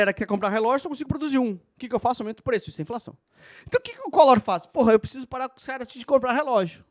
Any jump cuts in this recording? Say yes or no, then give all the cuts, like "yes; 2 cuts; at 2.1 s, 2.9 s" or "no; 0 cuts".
no; 0 cuts